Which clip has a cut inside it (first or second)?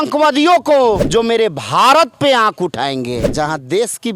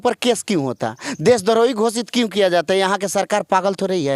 first